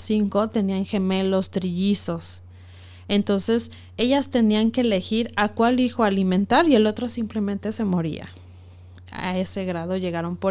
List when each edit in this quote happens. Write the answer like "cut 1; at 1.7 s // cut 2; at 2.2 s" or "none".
none